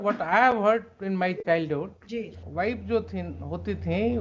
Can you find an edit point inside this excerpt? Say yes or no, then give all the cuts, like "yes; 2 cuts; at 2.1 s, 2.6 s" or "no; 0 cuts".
yes; 1 cut; at 2.4 s